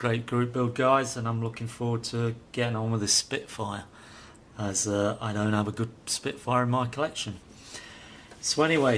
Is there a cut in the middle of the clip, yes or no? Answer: yes